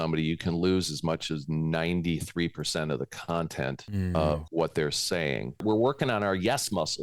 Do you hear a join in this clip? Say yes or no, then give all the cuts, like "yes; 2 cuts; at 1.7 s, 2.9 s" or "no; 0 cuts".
yes; 2 cuts; at 4.3 s, 5.6 s